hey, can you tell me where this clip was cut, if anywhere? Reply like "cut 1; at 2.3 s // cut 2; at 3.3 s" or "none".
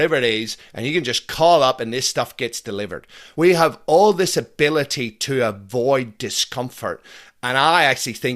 cut 1; at 3.2 s